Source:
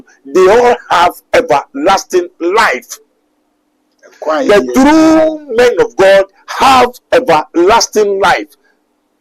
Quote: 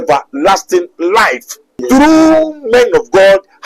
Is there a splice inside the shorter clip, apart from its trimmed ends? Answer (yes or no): yes